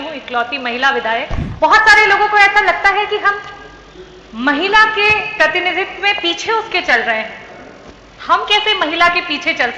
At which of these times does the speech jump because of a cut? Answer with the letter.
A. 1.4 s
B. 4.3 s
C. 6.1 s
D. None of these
A